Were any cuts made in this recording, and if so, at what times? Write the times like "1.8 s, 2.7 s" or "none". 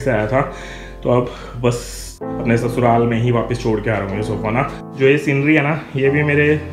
2.2 s, 4.7 s